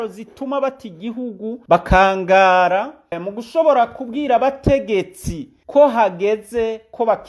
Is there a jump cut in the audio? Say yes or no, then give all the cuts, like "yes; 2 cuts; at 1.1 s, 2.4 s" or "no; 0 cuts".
no; 0 cuts